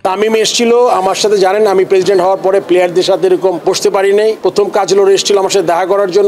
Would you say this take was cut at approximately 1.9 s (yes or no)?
no